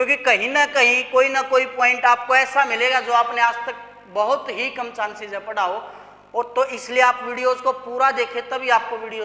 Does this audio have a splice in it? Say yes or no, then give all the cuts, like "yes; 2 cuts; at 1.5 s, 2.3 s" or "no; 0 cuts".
no; 0 cuts